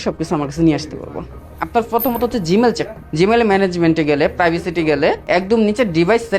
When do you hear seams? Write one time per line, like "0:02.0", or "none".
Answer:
0:01.6
0:03.0
0:05.2